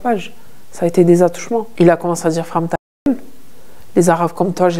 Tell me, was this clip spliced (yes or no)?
yes